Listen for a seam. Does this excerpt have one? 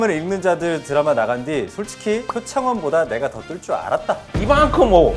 yes; 2 cuts; at 2.4 s, 4.3 s

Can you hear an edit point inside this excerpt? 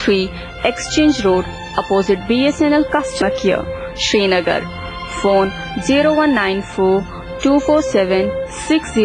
yes; 1 cut; at 3.2 s

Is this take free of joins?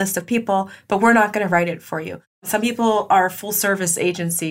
no; 1 cut; at 2.4 s

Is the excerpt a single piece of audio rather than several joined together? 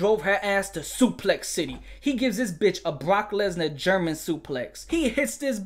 no; 1 cut; at 4.7 s

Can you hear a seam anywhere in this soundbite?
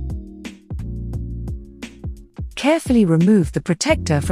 yes; 2 cuts; at 1.4 s, 2.5 s

